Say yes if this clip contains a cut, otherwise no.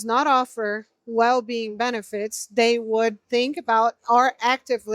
yes